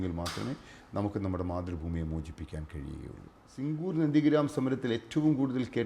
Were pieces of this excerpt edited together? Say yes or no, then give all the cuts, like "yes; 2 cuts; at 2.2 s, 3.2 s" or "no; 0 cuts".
yes; 1 cut; at 3.7 s